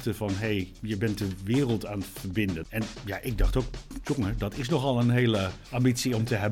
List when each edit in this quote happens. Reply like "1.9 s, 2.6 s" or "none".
2.6 s, 5.6 s